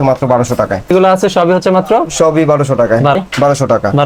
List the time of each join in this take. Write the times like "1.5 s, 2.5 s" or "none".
0.9 s, 3.2 s